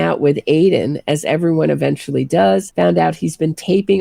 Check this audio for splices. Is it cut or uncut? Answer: cut